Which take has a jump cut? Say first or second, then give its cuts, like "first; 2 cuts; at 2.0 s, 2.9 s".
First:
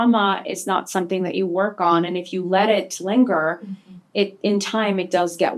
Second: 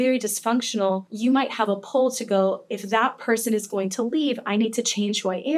second; 1 cut; at 1.1 s